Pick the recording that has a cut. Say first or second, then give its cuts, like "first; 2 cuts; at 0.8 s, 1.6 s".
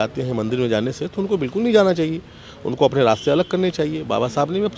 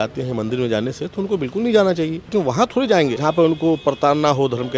second; 2 cuts; at 2.2 s, 3.2 s